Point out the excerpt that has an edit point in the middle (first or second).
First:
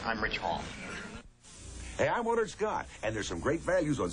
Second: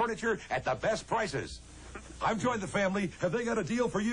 first